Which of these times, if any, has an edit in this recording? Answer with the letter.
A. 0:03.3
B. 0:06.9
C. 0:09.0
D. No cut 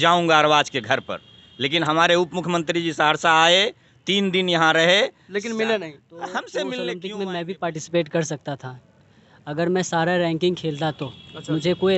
B